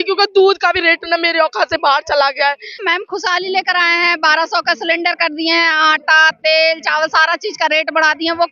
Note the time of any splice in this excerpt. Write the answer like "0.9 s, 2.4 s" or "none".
2.8 s